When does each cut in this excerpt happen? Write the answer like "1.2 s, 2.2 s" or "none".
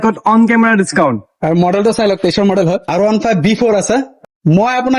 2.8 s, 4.1 s